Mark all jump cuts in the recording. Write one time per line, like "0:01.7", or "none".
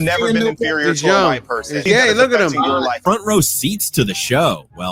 0:01.8
0:03.0

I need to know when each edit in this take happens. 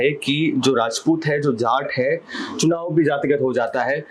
none

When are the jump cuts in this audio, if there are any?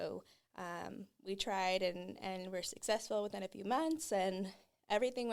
none

